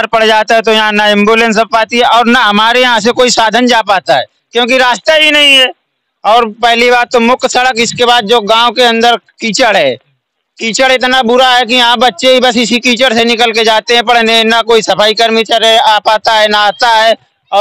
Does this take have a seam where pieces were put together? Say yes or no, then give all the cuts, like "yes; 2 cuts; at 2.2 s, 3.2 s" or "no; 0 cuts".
no; 0 cuts